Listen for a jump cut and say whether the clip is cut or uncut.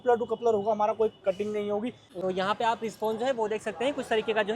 cut